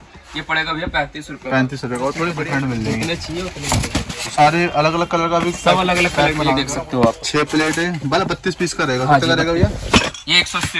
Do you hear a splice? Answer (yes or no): yes